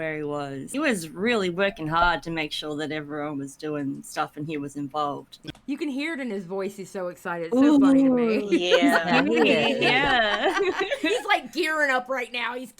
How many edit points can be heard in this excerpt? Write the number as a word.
two